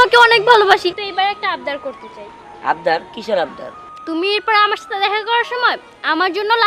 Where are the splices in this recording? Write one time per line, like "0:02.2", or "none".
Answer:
0:00.9